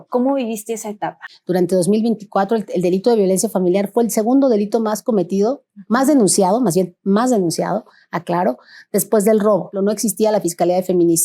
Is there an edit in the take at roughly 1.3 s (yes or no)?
yes